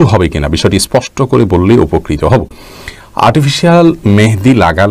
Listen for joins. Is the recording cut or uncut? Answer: uncut